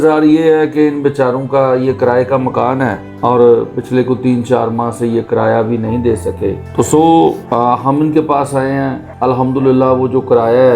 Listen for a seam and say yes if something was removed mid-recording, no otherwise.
yes